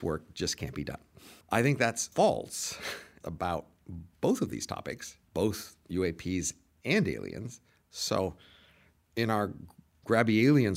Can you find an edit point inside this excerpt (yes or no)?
yes